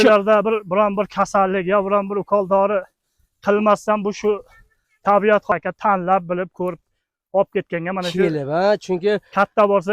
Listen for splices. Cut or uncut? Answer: cut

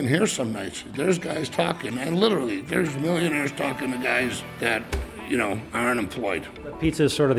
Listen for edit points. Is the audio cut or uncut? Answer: uncut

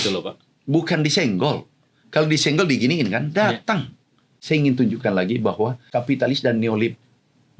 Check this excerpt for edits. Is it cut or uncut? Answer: cut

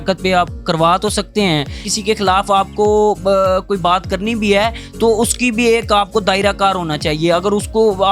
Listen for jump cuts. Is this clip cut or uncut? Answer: cut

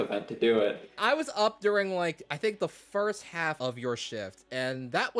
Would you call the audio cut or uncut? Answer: cut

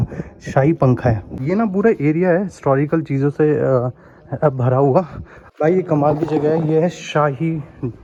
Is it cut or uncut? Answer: uncut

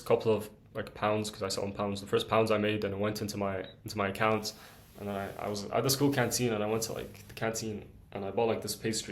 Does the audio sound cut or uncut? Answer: uncut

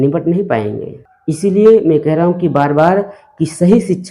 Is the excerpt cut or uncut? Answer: cut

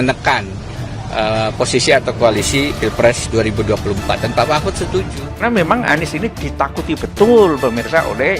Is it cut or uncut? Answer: cut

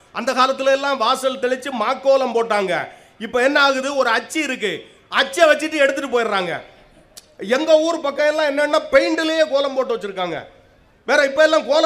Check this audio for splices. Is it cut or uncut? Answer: uncut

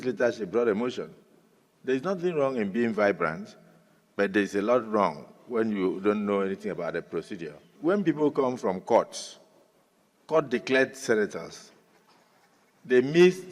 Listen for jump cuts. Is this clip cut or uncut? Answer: cut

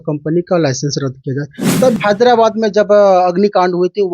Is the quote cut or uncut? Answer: cut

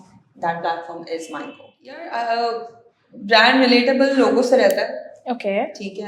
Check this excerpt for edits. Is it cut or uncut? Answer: cut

